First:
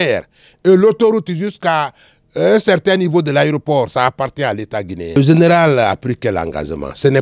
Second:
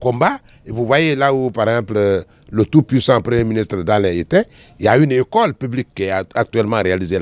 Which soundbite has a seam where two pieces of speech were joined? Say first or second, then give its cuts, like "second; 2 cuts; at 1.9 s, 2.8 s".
first; 1 cut; at 5.2 s